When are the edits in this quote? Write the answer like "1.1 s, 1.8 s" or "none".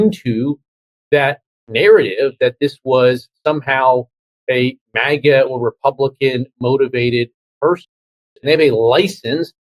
8.3 s